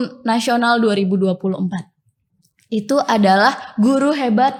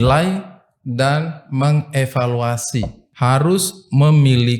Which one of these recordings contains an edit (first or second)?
second